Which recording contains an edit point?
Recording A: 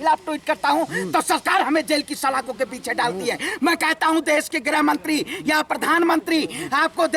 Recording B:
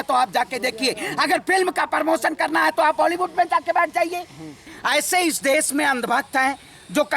B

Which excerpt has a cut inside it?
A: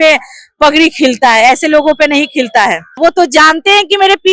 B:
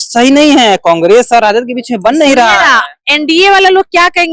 A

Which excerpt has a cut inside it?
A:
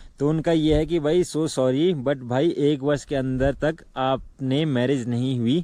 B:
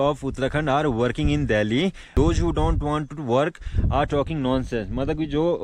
B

